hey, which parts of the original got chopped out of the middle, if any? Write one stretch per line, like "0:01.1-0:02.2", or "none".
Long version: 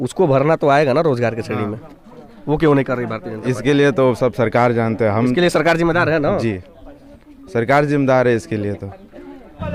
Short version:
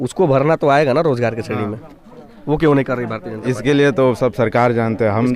none